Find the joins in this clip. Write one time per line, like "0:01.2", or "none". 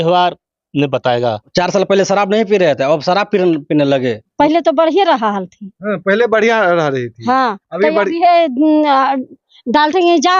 0:01.4
0:04.3

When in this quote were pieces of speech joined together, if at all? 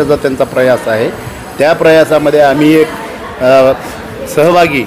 none

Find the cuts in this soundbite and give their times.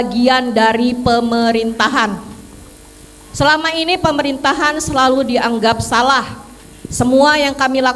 none

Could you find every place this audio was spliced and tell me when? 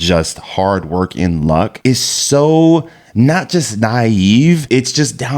0:01.7
0:04.6

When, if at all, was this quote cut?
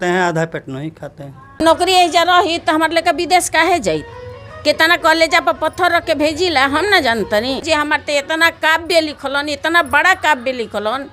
0:01.6
0:07.6

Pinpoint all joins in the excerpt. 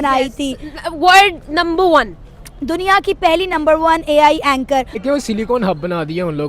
0:05.0

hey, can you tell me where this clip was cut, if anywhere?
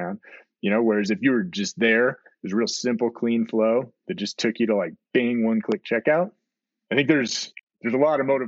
none

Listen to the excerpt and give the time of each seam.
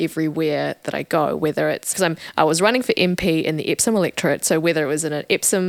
none

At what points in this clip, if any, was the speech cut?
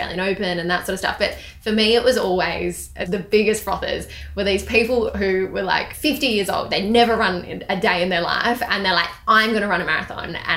0:03.0
0:05.9

